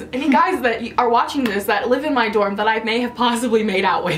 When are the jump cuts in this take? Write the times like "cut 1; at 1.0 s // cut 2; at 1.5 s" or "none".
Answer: none

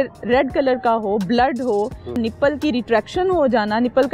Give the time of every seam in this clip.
cut 1; at 2.2 s

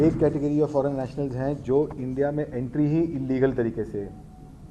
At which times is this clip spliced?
none

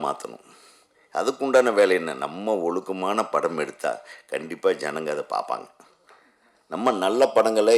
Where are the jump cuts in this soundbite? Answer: none

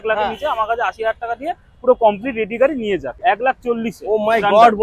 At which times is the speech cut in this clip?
cut 1; at 3.2 s

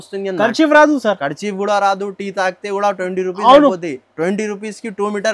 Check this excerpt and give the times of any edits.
none

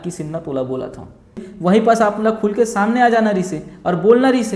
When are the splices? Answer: cut 1; at 1.5 s

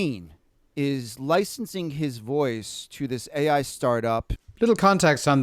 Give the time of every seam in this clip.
cut 1; at 4.4 s

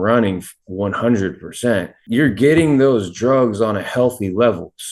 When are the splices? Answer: cut 1; at 2.0 s

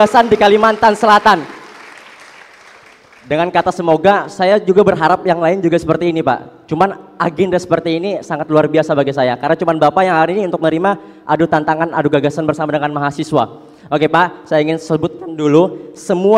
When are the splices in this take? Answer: none

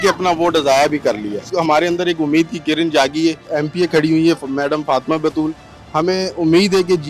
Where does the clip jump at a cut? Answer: cut 1; at 1.5 s // cut 2; at 3.4 s

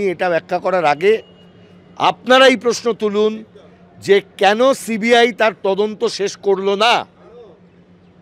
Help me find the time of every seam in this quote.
none

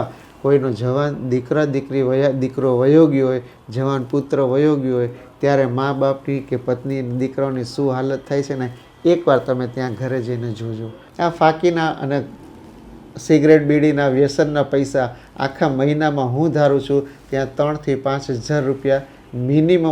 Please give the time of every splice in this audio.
cut 1; at 11.0 s

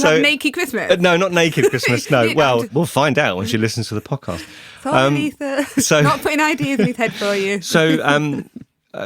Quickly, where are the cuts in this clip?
cut 1; at 2.7 s

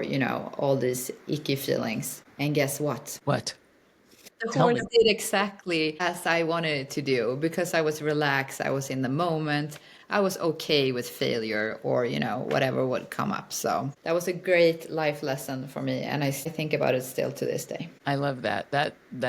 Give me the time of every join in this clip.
cut 1; at 2.2 s // cut 2; at 3.1 s // cut 3; at 4.3 s // cut 4; at 6.0 s // cut 5; at 13.9 s // cut 6; at 16.5 s // cut 7; at 17.9 s

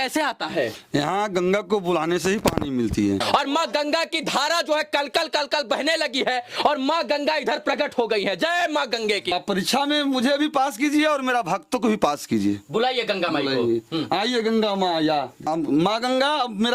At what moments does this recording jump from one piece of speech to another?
cut 1; at 3.2 s // cut 2; at 9.3 s // cut 3; at 15.5 s

